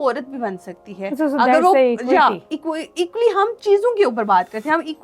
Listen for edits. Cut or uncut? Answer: uncut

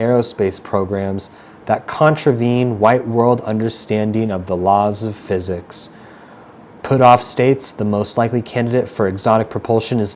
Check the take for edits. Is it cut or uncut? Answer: uncut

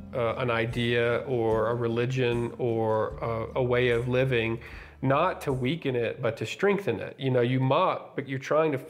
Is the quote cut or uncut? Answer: uncut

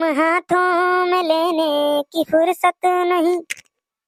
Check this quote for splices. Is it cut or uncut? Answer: uncut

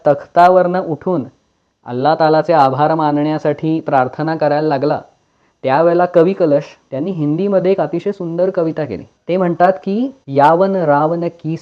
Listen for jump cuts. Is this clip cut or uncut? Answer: cut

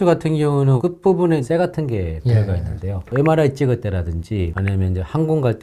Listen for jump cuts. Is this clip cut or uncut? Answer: cut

